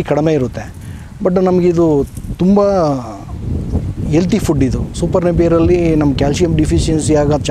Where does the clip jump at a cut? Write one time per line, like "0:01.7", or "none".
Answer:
none